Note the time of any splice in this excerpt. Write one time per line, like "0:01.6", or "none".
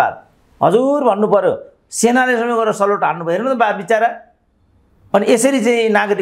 none

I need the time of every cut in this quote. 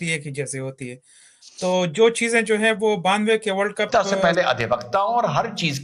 0:03.9

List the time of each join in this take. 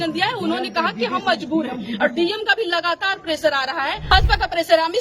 0:04.1

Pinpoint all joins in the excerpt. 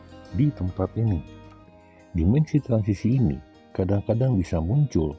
0:01.6

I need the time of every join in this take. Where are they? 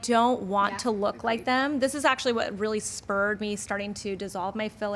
none

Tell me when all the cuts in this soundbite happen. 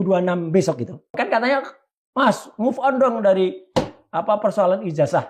0:01.1

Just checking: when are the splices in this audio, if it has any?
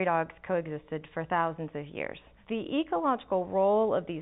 0:02.3

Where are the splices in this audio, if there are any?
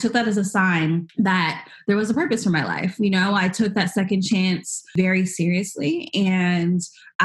0:01.1
0:04.9

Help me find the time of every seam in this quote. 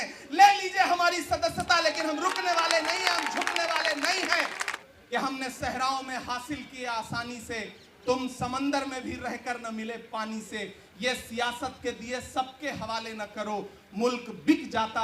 0:04.7

